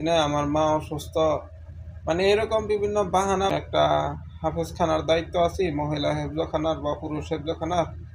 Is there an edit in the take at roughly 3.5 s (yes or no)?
yes